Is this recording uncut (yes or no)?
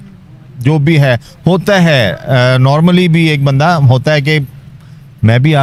yes